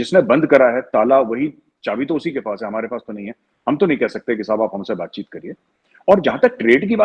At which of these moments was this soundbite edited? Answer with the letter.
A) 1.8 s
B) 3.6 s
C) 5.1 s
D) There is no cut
D